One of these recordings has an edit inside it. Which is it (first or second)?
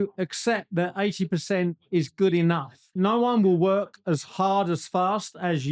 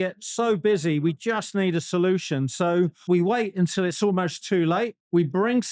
first